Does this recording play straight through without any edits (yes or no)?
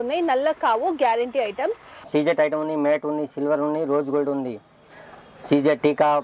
no